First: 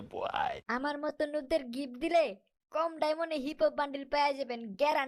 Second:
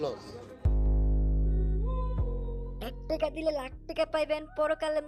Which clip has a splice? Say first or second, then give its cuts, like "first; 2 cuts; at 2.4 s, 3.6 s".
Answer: second; 1 cut; at 2.5 s